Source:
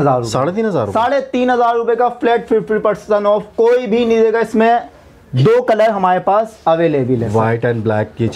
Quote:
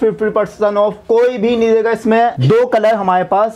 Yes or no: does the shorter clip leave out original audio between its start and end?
yes